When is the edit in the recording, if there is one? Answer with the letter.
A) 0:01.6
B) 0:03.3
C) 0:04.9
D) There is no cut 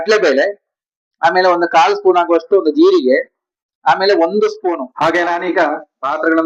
C